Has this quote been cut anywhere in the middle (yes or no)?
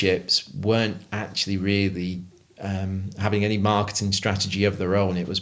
no